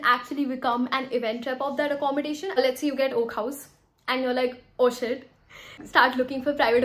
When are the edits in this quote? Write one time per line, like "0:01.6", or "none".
0:02.6
0:05.8